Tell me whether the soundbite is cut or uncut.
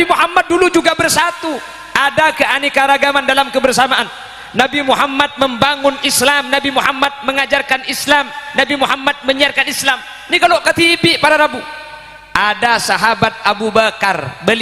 uncut